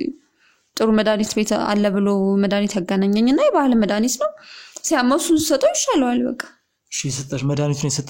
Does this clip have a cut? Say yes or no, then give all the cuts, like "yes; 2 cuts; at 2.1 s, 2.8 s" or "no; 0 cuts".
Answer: no; 0 cuts